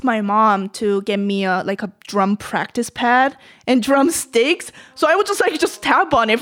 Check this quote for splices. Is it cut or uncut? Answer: uncut